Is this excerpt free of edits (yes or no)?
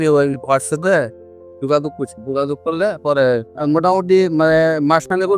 no